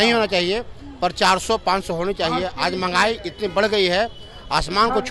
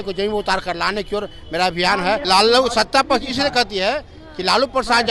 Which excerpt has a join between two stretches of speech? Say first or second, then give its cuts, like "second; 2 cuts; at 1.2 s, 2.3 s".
second; 1 cut; at 2.2 s